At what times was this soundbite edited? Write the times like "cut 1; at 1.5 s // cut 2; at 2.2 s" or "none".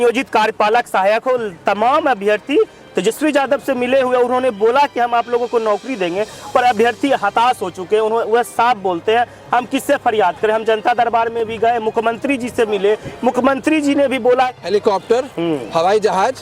cut 1; at 14.5 s